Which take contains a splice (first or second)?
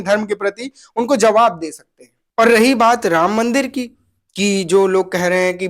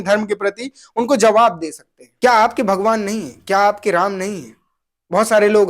second